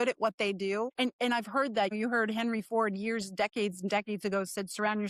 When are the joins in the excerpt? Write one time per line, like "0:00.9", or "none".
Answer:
0:00.9
0:01.9